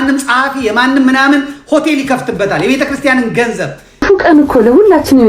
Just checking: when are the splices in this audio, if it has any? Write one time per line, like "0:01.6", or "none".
0:04.0